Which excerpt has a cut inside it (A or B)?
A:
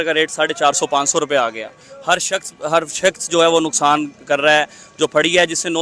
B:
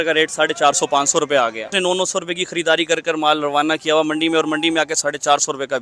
B